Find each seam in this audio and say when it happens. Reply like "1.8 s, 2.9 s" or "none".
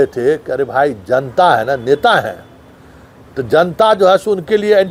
none